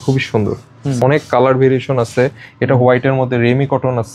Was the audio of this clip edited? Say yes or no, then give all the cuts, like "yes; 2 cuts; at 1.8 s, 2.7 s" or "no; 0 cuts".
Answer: yes; 1 cut; at 1.0 s